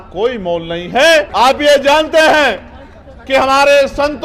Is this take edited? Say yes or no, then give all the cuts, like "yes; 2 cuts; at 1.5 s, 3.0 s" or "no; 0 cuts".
yes; 1 cut; at 1.3 s